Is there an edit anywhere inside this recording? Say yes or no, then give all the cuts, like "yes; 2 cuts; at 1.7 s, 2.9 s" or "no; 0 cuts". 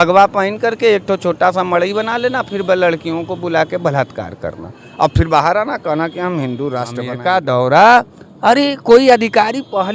yes; 1 cut; at 7.1 s